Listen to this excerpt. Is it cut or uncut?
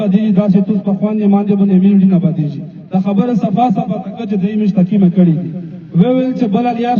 uncut